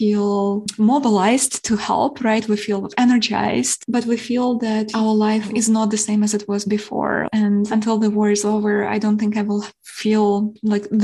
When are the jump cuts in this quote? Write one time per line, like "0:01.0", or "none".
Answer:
0:02.9
0:03.8
0:07.2